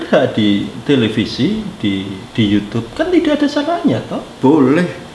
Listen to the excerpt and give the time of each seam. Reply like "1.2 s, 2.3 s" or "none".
none